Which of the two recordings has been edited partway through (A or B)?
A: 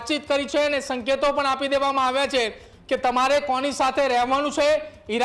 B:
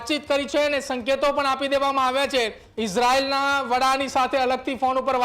B